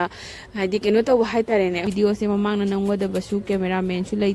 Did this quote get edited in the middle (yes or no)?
yes